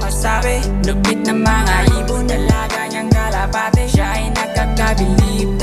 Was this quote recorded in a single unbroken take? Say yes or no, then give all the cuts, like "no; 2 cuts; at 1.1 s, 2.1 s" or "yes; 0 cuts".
yes; 0 cuts